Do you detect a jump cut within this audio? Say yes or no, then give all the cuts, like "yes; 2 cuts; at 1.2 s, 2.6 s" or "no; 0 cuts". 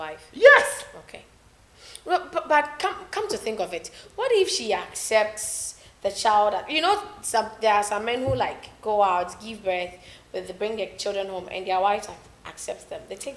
no; 0 cuts